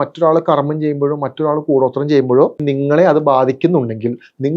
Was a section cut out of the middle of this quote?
yes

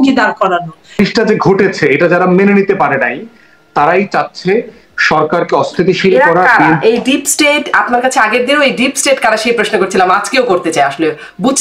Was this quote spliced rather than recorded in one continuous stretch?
yes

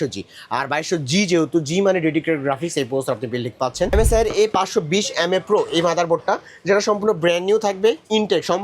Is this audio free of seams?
no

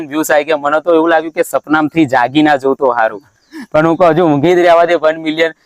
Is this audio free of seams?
yes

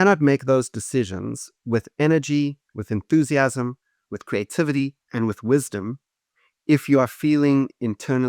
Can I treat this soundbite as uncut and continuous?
no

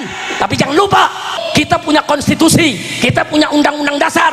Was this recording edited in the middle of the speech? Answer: yes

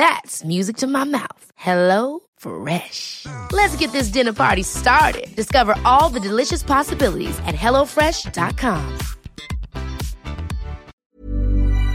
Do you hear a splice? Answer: yes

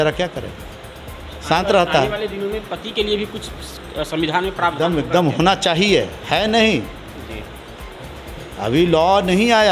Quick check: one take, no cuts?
yes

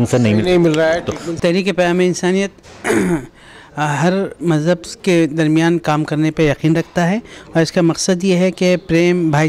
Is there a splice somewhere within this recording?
yes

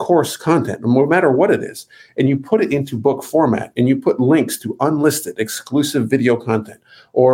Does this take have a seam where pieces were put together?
no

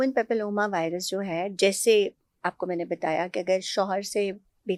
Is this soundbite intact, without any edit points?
yes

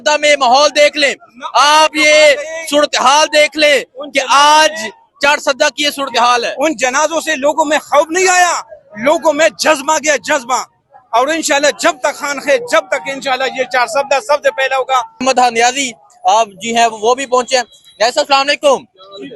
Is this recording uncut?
no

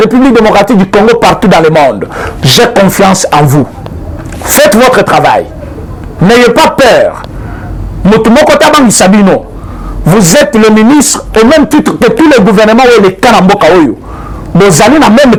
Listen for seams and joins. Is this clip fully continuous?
yes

